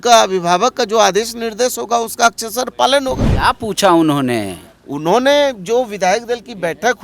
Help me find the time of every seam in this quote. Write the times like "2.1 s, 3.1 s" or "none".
3.3 s